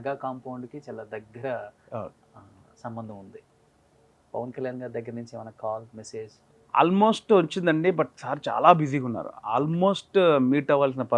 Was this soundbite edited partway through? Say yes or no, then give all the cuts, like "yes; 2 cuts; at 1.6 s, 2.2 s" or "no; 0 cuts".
no; 0 cuts